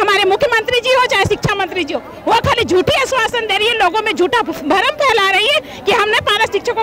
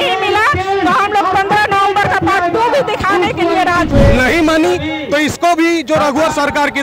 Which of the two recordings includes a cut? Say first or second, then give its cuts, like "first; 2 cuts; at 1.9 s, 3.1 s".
second; 1 cut; at 3.9 s